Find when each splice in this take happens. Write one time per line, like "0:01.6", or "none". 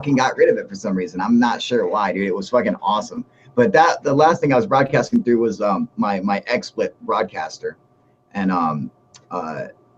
0:07.9

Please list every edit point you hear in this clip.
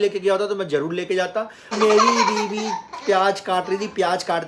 0:01.7

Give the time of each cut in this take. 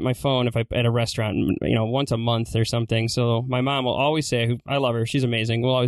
none

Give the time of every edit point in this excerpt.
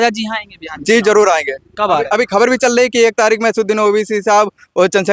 none

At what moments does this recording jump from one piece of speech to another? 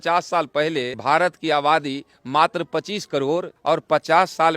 0:00.9
0:03.5

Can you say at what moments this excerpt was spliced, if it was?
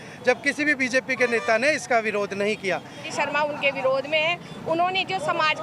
0:03.1

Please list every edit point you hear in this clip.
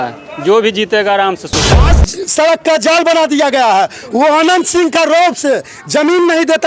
0:02.0

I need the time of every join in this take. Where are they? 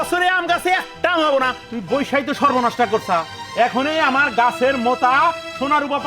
0:01.7

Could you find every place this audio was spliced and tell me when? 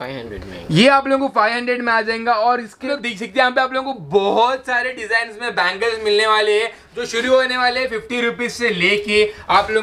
0:02.9

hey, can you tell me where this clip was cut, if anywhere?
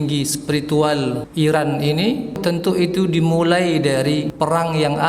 0:01.2
0:02.4
0:04.3

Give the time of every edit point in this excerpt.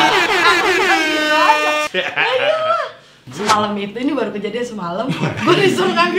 0:03.2

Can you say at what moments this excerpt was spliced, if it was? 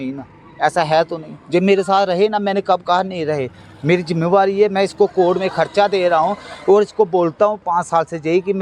none

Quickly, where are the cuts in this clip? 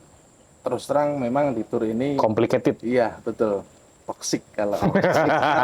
none

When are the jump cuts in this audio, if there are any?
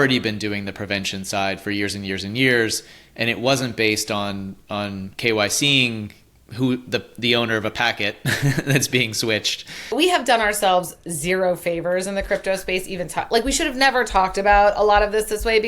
0:09.8

